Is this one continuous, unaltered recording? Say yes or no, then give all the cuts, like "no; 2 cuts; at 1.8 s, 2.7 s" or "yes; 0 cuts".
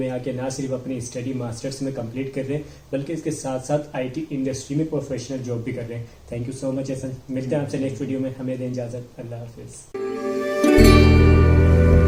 yes; 0 cuts